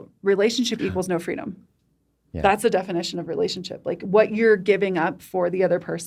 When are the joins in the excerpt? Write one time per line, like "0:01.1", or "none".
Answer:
none